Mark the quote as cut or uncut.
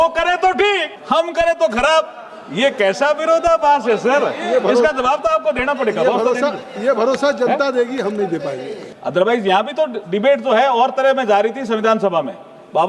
cut